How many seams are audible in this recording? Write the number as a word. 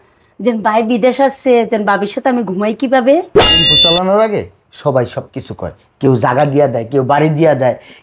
one